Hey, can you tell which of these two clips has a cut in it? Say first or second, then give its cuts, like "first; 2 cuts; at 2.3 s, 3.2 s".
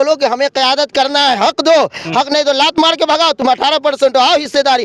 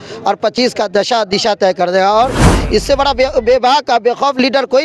second; 1 cut; at 2.5 s